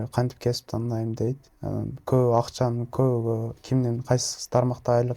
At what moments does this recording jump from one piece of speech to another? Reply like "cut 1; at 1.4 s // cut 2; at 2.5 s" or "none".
none